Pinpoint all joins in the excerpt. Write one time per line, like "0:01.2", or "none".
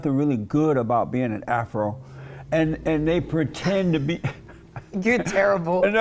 none

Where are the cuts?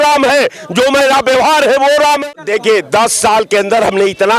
0:02.2

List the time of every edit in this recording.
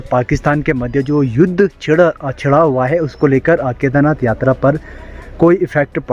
none

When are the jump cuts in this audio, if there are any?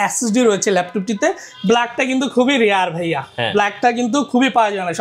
0:01.5

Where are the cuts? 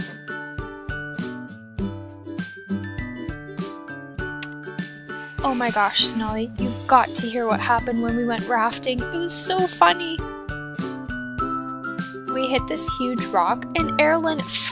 0:08.5

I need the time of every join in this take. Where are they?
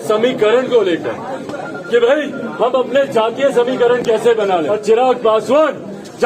0:04.7

